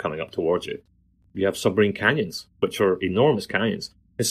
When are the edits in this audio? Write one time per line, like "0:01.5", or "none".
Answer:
0:01.2